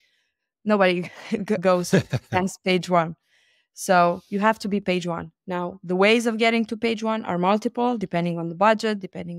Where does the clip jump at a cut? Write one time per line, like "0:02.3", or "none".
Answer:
none